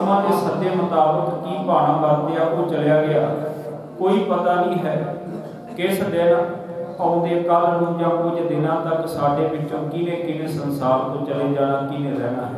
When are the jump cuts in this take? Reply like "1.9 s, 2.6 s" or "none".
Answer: none